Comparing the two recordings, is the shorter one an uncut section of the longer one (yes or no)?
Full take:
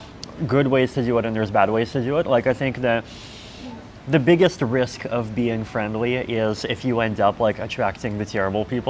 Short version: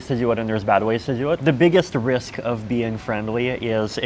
no